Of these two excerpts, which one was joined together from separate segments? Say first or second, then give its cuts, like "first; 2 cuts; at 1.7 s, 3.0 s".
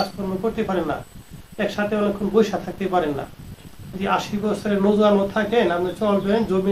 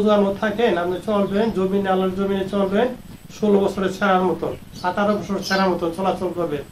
first; 1 cut; at 4.0 s